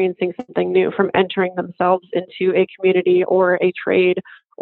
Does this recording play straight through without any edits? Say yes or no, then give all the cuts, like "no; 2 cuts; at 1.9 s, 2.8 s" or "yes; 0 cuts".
yes; 0 cuts